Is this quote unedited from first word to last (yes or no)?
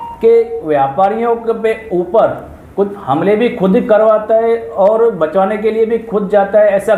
yes